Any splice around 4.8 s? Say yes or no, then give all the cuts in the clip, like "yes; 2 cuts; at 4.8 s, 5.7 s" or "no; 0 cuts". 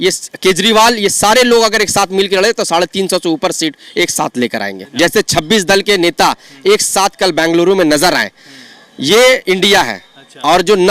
yes; 1 cut; at 4.8 s